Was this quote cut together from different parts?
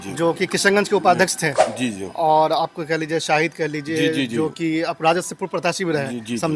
no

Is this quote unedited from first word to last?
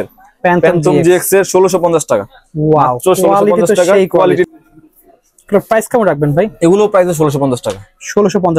no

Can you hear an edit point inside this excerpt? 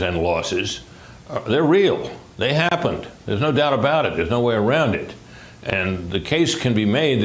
yes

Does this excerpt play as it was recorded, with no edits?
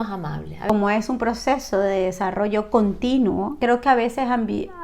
no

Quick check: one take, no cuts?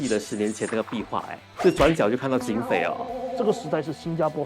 no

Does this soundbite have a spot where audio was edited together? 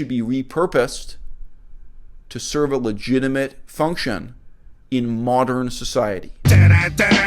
yes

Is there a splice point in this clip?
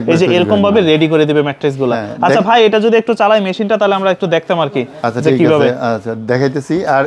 no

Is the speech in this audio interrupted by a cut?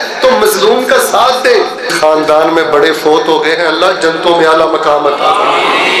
yes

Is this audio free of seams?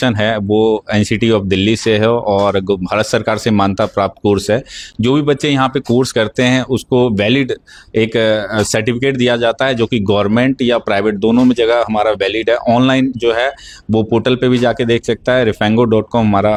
yes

